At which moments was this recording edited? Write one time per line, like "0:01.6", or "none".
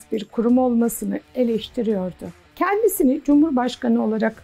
0:01.2
0:02.4